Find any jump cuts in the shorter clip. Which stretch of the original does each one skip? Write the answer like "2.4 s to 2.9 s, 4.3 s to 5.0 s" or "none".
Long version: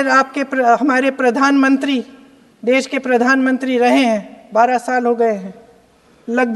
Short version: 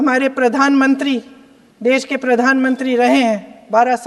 none

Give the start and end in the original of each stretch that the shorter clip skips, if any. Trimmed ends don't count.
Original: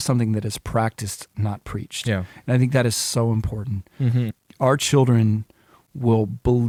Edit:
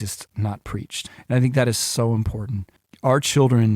2.0 s to 2.2 s, 3.9 s to 4.3 s

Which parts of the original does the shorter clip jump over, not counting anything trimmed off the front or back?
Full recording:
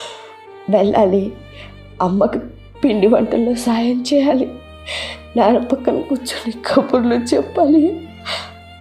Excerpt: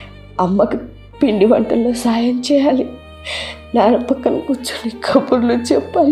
none

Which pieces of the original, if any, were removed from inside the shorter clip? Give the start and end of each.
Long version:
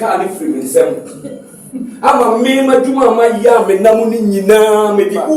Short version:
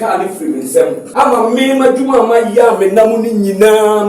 1.0 s to 1.9 s

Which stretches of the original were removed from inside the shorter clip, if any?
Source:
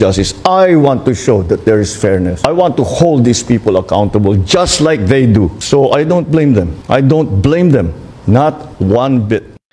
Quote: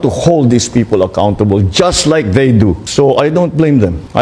none

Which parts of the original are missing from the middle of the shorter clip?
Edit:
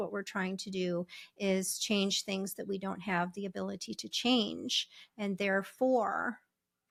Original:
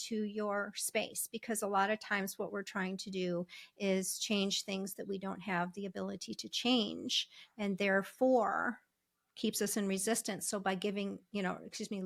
none

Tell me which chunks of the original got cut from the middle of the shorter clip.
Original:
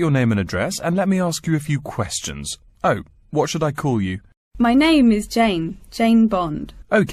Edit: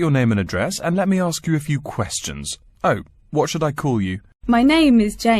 4.3 s to 4.4 s

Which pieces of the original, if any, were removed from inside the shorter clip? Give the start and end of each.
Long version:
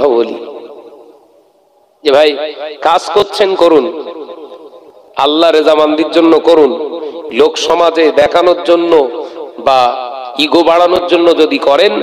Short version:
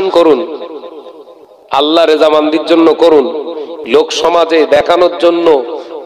none

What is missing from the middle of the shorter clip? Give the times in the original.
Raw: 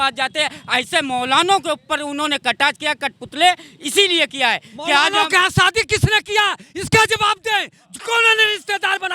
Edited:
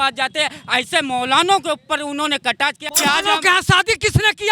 2.8 s to 4.7 s

